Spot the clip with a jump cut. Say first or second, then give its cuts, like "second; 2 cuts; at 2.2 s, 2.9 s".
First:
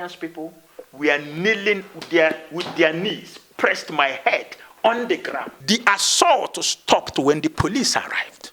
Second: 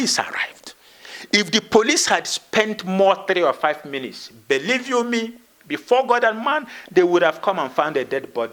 first; 1 cut; at 5.5 s